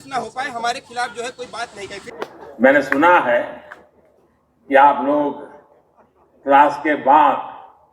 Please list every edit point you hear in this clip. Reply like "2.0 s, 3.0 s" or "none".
2.1 s